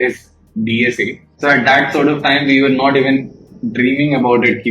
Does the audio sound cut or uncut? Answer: cut